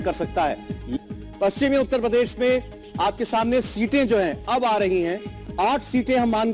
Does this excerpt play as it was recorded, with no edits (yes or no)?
no